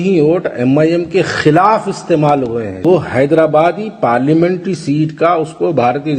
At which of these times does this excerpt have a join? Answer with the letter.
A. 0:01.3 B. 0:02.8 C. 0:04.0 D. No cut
B